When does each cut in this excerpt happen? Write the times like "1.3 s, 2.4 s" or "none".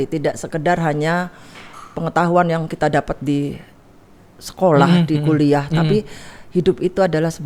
none